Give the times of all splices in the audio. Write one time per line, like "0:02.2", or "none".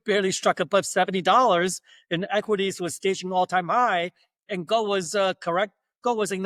none